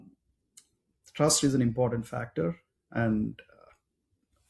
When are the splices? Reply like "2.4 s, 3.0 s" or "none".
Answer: none